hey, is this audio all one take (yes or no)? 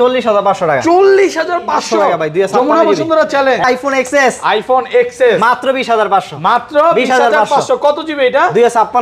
no